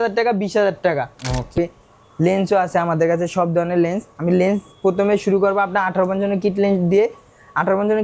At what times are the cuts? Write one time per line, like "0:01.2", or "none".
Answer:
0:01.5